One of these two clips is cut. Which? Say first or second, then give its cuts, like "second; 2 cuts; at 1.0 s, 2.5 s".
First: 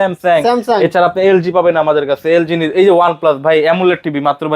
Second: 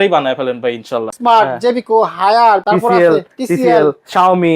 second; 2 cuts; at 1.1 s, 2.6 s